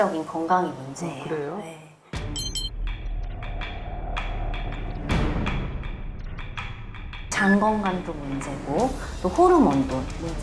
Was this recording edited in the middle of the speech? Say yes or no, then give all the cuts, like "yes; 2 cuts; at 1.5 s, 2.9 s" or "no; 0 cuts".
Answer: yes; 1 cut; at 7.3 s